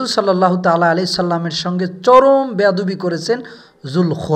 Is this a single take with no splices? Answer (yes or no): yes